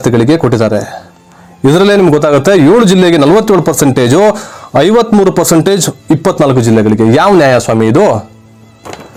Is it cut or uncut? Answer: uncut